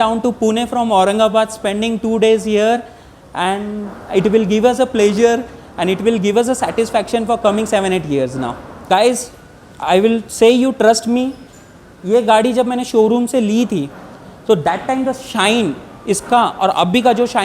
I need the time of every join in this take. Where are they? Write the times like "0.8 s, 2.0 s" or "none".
8.8 s